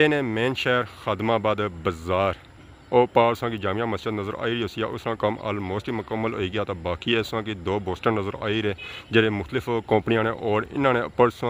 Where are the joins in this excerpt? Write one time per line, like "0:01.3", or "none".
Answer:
none